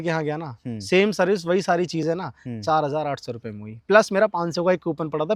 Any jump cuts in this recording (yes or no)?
no